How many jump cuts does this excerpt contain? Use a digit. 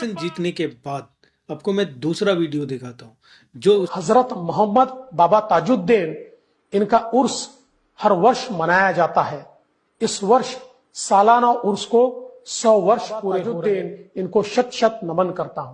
2